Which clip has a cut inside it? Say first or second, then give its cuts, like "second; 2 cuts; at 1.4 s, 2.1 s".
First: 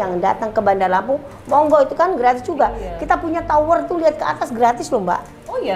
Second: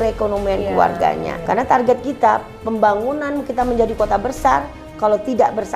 second; 1 cut; at 1.3 s